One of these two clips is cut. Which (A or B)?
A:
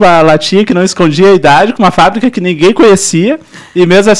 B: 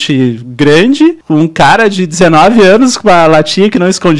B